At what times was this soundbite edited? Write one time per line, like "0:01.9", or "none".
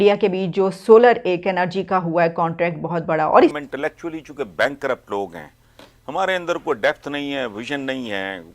0:03.5